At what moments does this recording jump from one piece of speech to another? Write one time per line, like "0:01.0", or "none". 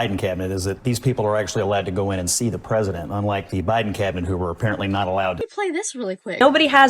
0:05.5